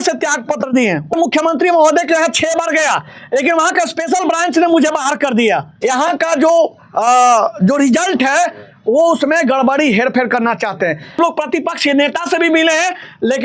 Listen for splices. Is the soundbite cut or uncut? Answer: cut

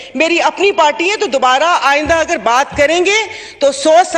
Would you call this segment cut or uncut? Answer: uncut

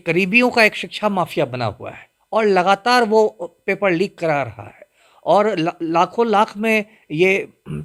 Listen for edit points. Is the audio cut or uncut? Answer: uncut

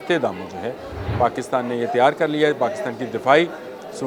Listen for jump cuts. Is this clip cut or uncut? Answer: uncut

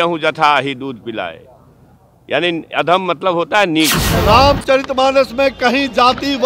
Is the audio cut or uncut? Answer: cut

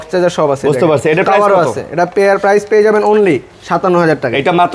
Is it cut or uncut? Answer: uncut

